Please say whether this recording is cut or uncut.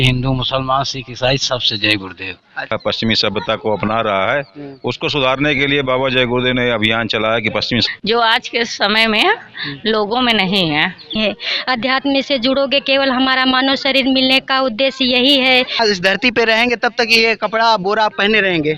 cut